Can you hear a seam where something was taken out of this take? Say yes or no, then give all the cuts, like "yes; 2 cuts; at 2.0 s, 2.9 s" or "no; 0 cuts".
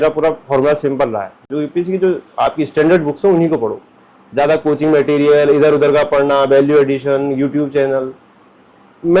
no; 0 cuts